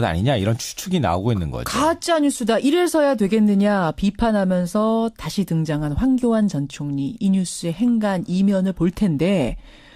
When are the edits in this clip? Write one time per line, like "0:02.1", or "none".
0:08.5